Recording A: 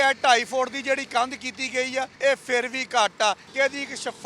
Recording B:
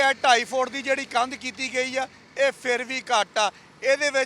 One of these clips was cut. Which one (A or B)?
A